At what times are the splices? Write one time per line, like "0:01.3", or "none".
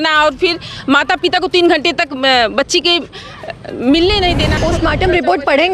0:04.6